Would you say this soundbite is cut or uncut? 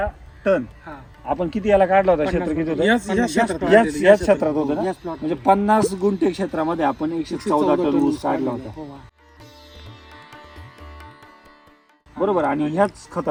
uncut